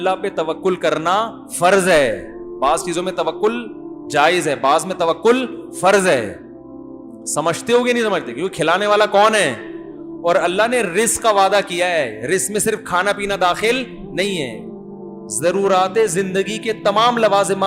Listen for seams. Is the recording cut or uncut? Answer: uncut